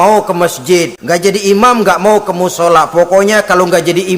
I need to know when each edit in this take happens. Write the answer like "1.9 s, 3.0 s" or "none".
1.0 s

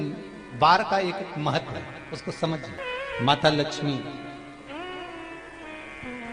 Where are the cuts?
2.8 s

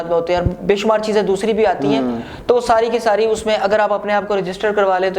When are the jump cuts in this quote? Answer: none

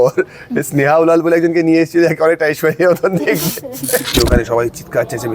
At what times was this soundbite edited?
4.1 s

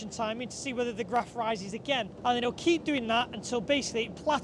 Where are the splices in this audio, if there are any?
2.1 s

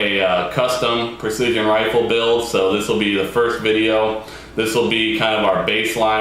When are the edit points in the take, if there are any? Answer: 4.8 s

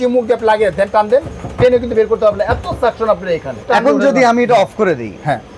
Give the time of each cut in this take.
3.5 s

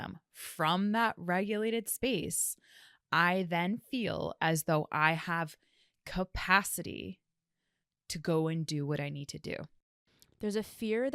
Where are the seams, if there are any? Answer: 9.8 s

